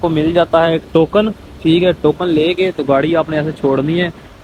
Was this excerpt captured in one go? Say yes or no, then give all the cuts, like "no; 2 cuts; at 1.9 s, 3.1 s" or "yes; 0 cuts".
yes; 0 cuts